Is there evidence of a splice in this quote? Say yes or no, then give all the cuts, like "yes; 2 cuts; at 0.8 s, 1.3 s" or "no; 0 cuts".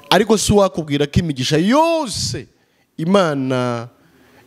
no; 0 cuts